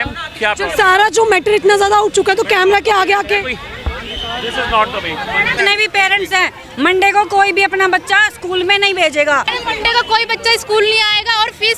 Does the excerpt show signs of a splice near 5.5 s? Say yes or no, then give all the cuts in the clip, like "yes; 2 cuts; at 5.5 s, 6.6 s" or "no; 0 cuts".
yes; 2 cuts; at 5.5 s, 9.5 s